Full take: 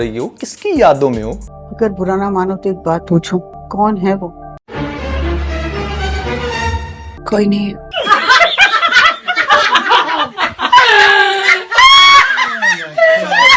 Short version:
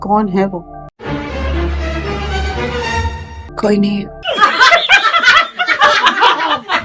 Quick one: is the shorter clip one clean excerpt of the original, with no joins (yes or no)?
yes